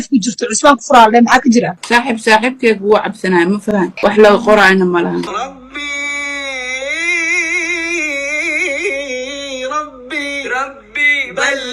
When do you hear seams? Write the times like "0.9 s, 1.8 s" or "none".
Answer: 1.8 s, 3.9 s, 5.3 s